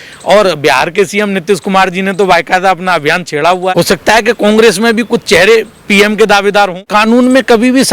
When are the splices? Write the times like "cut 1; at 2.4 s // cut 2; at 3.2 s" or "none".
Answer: cut 1; at 3.7 s // cut 2; at 6.9 s